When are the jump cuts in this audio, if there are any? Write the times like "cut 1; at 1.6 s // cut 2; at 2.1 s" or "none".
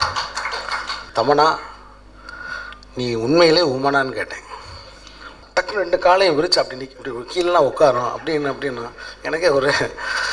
cut 1; at 0.9 s // cut 2; at 5.4 s